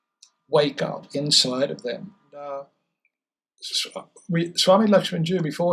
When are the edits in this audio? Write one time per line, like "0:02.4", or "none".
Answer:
0:02.3

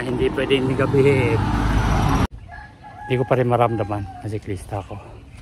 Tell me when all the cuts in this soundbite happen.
0:02.3

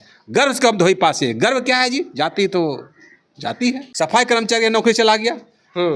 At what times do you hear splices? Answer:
0:03.9

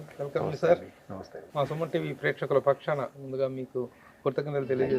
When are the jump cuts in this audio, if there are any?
0:01.4

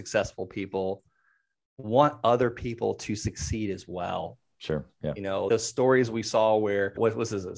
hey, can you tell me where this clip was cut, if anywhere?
0:05.5

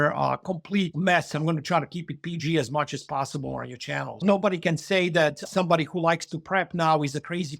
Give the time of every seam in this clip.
0:00.9
0:04.2
0:05.5

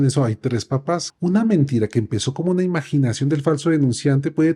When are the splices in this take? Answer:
0:01.1

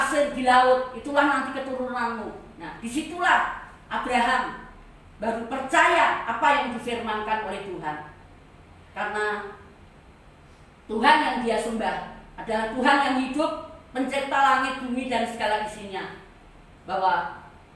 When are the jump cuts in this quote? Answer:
none

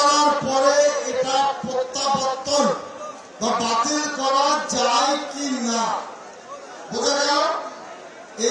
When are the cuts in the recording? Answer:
none

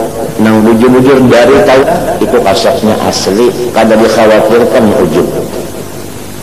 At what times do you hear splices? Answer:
0:01.8

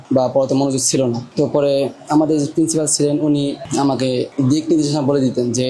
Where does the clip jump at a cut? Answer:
none

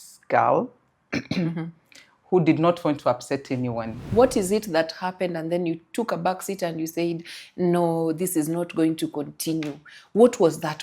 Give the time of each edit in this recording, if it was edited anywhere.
0:04.0

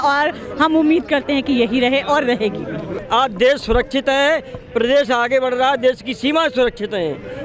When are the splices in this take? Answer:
0:02.9

